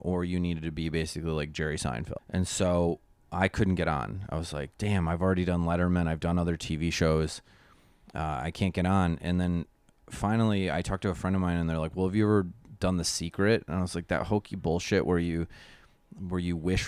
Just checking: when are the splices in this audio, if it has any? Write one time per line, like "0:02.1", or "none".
0:02.1